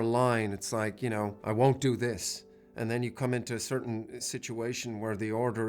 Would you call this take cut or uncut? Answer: cut